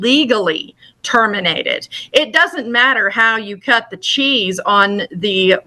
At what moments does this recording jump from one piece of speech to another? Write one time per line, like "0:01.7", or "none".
none